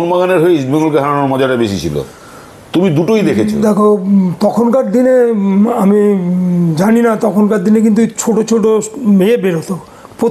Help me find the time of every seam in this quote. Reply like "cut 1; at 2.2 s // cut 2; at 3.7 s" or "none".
none